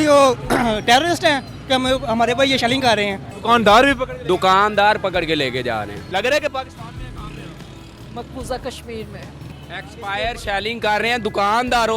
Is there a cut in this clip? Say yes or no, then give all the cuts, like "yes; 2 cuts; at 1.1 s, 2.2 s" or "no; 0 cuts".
yes; 3 cuts; at 3.3 s, 6.0 s, 9.6 s